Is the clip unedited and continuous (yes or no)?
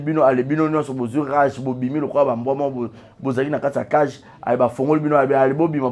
yes